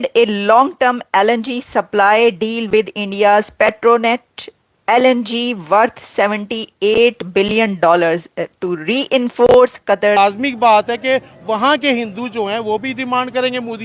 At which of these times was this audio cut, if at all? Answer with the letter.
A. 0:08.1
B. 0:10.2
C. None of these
B